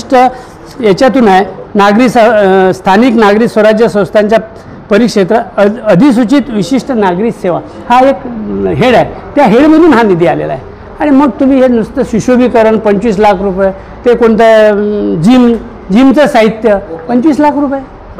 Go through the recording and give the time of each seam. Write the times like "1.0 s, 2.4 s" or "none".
none